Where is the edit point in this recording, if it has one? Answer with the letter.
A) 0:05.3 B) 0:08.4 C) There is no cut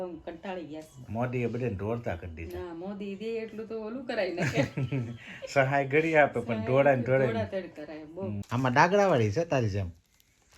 B